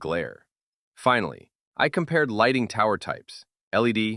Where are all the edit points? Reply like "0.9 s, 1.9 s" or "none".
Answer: none